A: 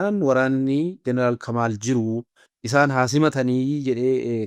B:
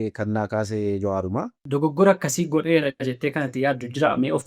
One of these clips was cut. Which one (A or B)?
B